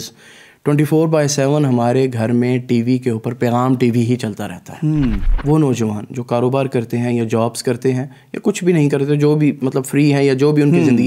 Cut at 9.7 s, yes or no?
no